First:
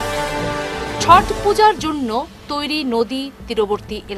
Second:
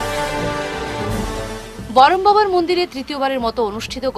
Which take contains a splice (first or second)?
second